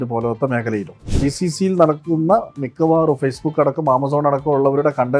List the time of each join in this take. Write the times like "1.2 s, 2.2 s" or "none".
1.1 s